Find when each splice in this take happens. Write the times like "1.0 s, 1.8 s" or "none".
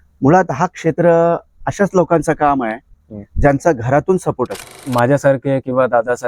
4.8 s